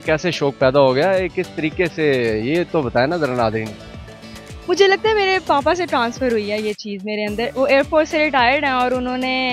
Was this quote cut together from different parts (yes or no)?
no